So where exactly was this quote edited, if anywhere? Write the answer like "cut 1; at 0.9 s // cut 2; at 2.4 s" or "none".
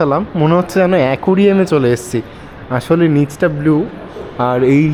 none